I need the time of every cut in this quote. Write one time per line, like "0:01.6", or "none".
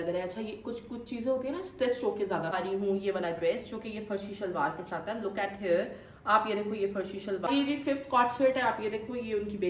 0:02.5
0:07.4